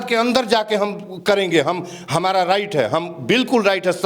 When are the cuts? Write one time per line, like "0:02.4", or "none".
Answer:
none